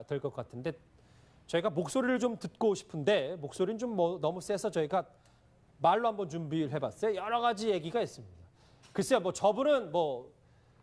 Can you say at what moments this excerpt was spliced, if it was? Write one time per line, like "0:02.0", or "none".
none